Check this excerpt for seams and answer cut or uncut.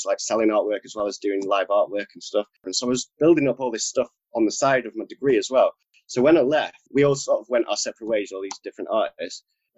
cut